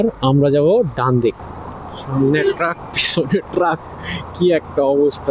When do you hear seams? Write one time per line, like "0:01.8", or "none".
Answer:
0:01.5